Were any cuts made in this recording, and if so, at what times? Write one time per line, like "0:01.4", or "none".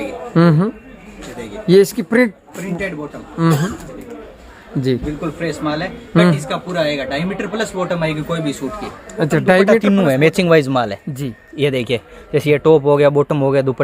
0:09.8